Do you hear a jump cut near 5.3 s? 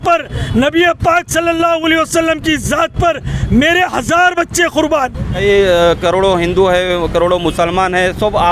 yes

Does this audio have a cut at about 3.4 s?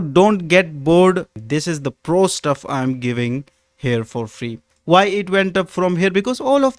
no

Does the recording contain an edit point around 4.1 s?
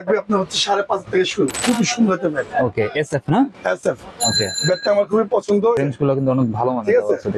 no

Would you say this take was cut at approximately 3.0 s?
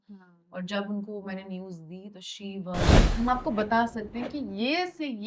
yes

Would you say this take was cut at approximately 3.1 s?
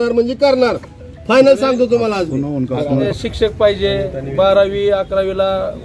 yes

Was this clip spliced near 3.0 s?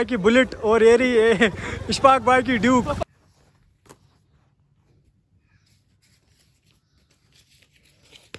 yes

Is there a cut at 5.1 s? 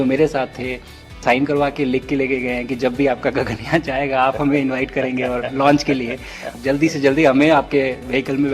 no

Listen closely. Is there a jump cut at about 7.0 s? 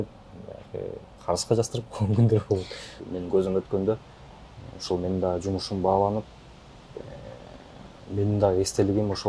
no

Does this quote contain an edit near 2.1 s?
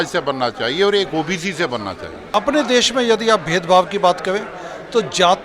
yes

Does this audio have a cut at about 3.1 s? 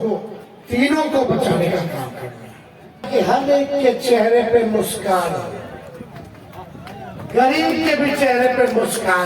yes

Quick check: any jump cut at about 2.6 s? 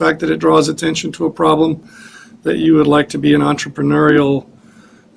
no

